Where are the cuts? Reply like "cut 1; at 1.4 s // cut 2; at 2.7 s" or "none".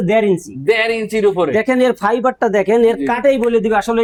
none